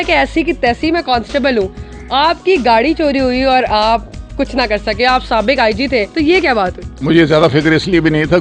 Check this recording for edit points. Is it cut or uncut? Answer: cut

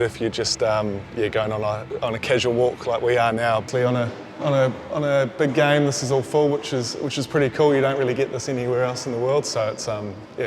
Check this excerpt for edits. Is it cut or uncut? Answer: cut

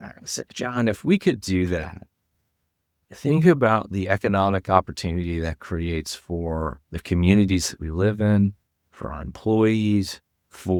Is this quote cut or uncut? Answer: uncut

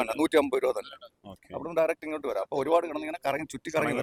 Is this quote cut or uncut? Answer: uncut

